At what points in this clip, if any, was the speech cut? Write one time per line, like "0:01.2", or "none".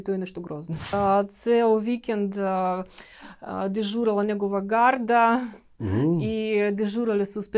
0:00.9

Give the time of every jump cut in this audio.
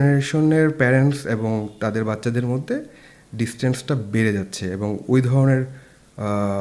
none

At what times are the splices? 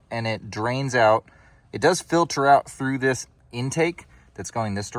0:03.3

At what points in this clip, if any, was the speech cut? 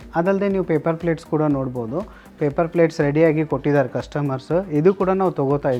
none

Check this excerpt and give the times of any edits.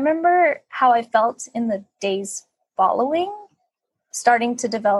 none

